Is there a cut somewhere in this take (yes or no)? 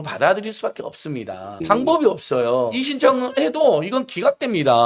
yes